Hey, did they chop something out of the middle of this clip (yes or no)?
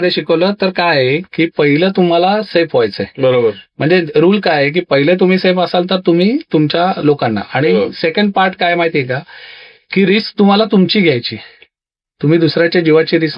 no